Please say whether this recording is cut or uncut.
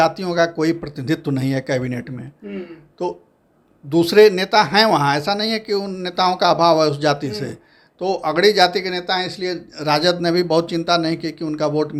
uncut